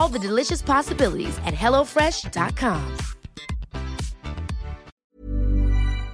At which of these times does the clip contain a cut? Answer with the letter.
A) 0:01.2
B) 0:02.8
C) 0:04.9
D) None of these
C